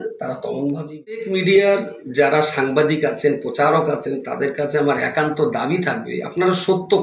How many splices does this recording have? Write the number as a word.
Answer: one